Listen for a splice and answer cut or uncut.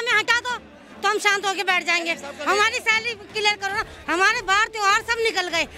uncut